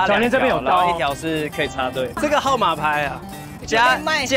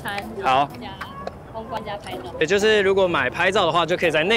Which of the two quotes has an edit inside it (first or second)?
first